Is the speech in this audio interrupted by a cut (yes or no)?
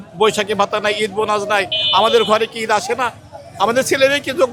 no